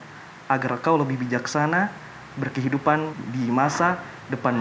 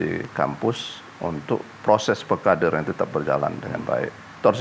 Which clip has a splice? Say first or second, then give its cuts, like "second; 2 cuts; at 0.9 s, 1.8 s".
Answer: first; 1 cut; at 3.1 s